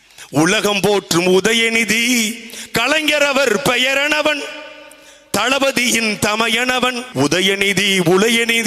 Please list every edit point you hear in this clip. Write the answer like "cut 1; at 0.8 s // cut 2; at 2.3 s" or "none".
cut 1; at 7.0 s